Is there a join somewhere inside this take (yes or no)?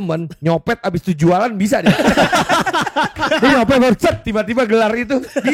no